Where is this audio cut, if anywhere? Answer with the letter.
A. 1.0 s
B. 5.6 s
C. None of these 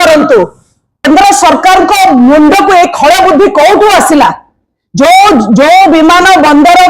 A